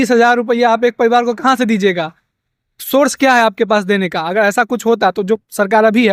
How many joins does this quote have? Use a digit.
0